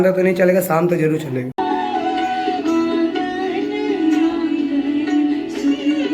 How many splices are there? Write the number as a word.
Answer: one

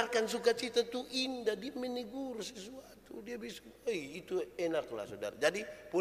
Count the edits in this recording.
zero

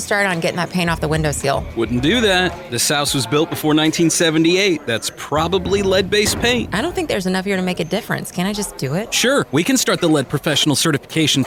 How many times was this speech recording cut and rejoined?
zero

